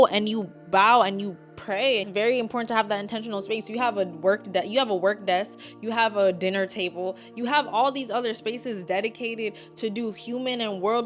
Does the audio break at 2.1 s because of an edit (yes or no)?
yes